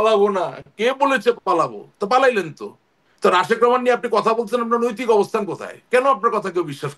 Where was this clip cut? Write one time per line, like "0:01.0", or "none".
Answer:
none